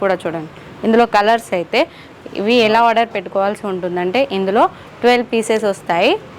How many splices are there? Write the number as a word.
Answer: zero